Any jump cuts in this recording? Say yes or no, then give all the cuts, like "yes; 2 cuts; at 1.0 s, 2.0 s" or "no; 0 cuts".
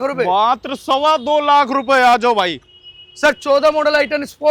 no; 0 cuts